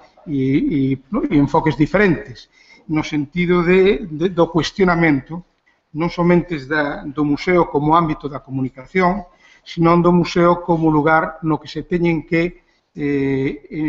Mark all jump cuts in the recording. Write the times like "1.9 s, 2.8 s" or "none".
7.9 s